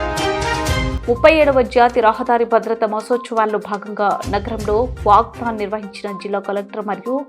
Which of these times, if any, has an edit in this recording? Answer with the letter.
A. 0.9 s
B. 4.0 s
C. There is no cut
A